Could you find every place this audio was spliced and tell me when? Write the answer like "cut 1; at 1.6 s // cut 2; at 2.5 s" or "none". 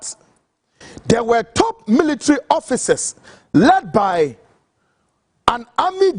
none